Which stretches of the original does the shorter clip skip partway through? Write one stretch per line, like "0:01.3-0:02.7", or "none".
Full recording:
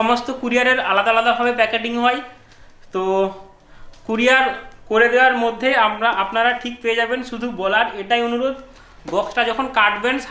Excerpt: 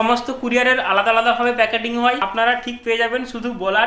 0:02.2-0:06.2